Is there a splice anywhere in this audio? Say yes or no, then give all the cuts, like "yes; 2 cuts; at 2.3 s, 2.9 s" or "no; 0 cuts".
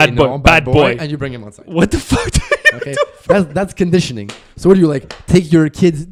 no; 0 cuts